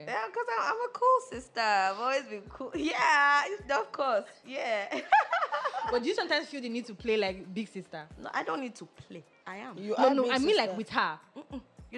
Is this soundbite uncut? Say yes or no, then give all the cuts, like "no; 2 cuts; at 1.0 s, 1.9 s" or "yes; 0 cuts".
yes; 0 cuts